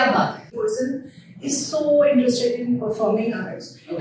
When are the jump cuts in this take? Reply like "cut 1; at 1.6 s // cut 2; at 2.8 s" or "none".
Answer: cut 1; at 0.9 s